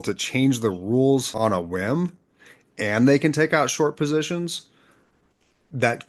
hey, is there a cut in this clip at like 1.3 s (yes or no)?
yes